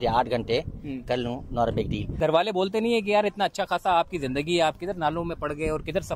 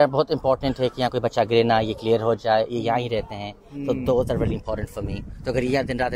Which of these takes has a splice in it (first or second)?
first